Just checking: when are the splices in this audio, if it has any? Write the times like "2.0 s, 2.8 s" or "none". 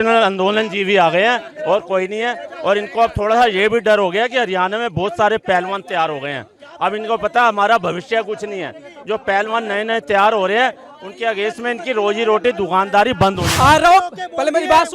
13.4 s

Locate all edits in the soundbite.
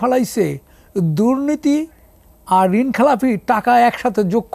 none

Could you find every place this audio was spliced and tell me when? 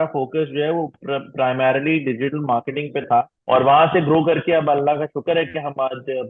3.4 s

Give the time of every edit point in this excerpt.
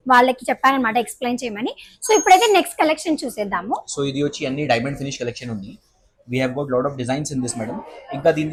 none

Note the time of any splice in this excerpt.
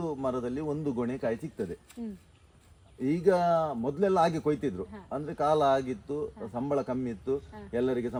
none

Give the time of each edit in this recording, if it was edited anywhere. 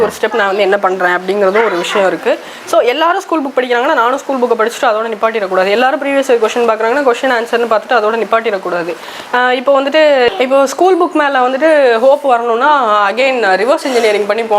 10.3 s

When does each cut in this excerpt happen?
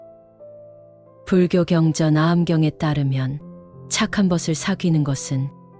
1.2 s

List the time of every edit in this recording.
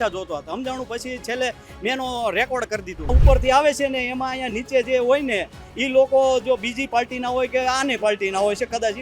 3.1 s

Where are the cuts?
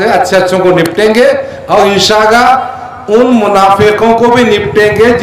none

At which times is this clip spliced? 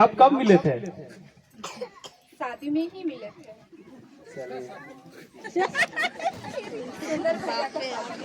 none

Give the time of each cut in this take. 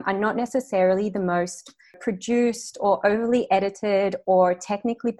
2.0 s

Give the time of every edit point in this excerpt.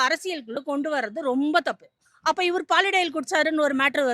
2.1 s

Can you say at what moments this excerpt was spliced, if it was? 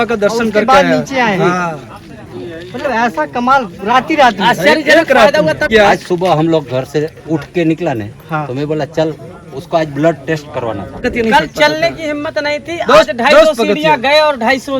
5.7 s, 10.9 s

